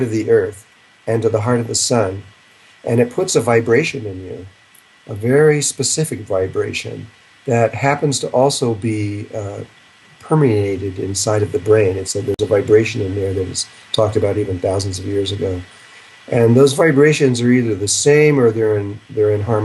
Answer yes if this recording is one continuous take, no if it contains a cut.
no